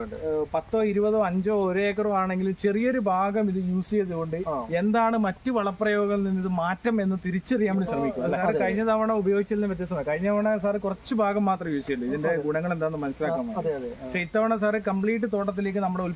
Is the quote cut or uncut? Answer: cut